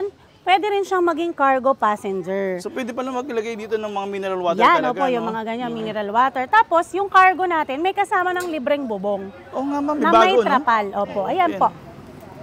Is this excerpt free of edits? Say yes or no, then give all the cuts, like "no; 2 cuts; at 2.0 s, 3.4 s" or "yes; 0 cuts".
yes; 0 cuts